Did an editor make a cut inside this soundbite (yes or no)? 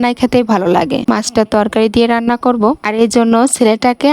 yes